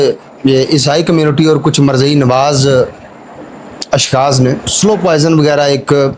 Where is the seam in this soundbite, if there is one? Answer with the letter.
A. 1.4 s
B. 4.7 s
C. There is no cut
B